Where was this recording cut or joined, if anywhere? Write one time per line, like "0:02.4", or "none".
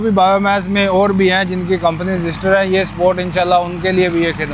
none